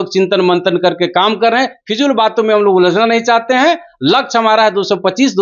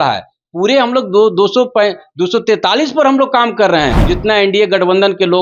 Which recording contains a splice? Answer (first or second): second